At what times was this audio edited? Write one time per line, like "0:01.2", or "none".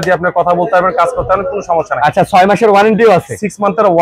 none